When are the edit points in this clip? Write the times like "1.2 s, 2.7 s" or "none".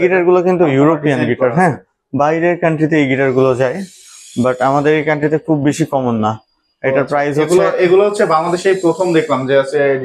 none